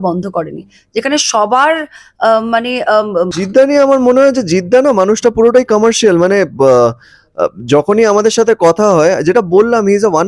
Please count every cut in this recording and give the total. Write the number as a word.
one